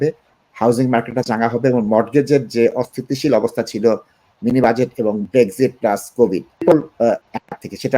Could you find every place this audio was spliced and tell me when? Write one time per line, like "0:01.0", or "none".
0:05.2
0:06.5